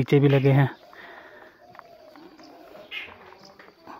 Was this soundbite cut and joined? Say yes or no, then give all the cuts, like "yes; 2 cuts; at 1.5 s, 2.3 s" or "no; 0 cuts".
no; 0 cuts